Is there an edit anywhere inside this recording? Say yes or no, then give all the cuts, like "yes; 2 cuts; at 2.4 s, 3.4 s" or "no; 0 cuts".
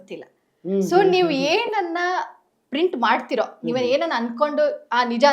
no; 0 cuts